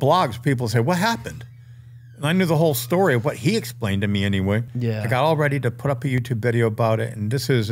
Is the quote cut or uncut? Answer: cut